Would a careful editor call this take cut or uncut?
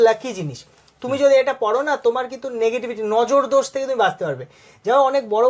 uncut